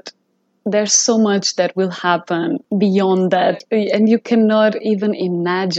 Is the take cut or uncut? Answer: cut